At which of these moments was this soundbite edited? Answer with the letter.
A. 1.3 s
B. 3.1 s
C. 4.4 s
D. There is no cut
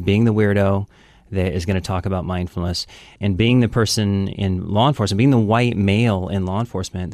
B